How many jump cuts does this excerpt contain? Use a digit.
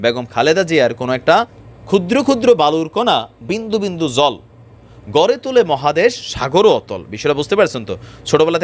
1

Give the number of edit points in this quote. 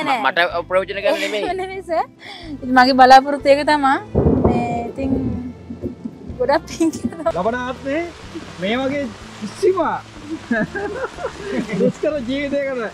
1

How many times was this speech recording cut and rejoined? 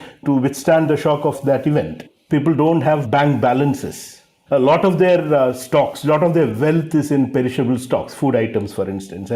1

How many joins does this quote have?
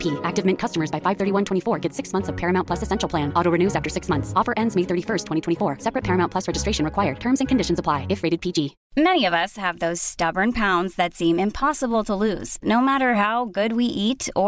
1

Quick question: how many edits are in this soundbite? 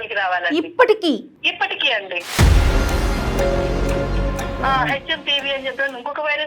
2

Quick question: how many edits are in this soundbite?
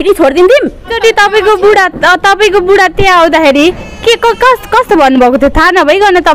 1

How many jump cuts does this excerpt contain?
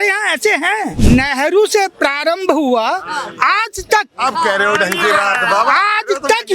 1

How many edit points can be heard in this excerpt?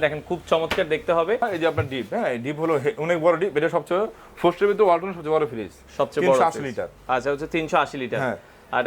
1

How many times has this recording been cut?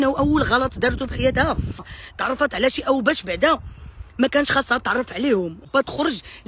2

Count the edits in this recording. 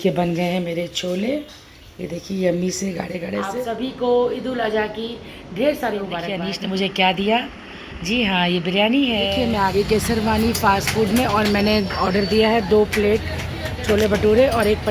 3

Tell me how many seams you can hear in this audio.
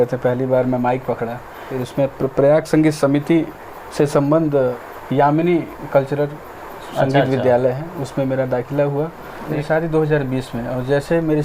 3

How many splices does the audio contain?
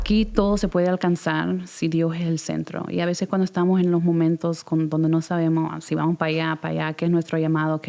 0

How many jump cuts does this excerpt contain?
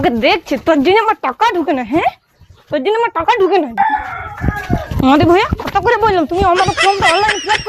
1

